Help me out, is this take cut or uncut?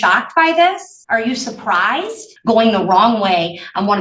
cut